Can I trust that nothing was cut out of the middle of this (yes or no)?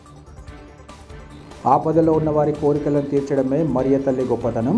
no